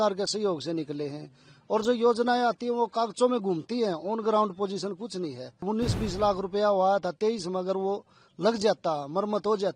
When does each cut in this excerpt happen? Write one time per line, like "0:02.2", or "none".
0:05.6